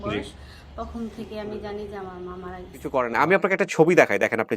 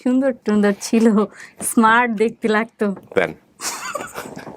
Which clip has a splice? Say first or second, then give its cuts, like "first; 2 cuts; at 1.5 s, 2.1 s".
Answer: first; 1 cut; at 2.9 s